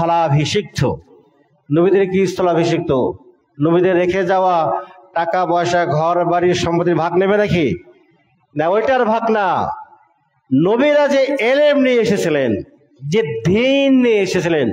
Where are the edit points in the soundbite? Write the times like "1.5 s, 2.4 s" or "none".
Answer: none